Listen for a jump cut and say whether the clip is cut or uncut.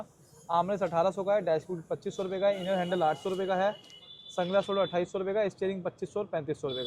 uncut